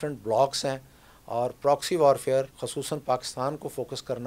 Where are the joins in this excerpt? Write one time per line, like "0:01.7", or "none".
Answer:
0:02.6

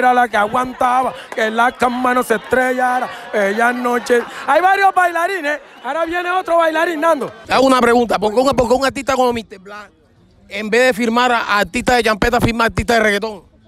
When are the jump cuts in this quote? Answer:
0:07.4

